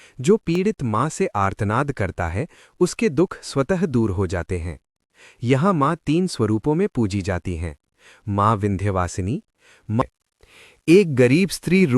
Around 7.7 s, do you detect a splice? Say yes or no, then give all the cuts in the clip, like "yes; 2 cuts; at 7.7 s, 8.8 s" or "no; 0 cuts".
no; 1 cut; at 10.1 s